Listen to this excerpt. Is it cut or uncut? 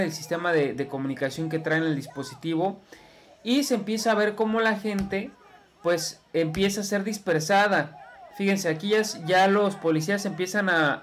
uncut